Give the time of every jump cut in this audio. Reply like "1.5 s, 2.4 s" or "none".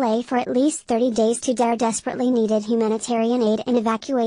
none